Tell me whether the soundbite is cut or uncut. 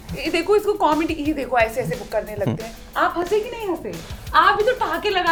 uncut